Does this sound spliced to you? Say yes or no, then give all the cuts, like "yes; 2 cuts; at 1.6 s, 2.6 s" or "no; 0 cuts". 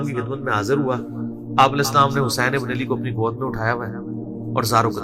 no; 0 cuts